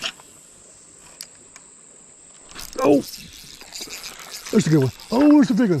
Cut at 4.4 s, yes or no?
no